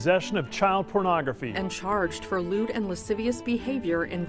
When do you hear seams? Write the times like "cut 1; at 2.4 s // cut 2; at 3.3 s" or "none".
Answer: cut 1; at 1.6 s